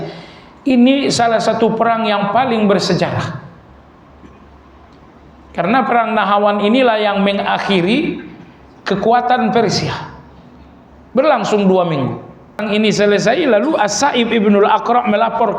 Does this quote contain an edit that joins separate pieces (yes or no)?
yes